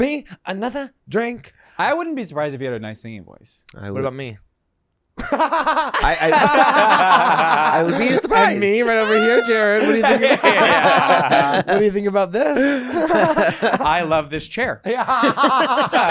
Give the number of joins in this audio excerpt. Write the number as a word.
zero